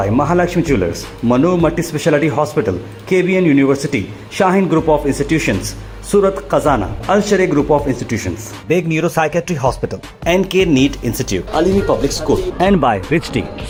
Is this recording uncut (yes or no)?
yes